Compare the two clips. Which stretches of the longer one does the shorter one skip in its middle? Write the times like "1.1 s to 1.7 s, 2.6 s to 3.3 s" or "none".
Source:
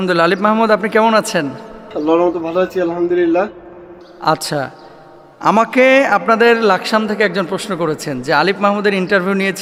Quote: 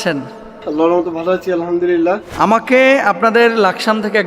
3.6 s to 5.3 s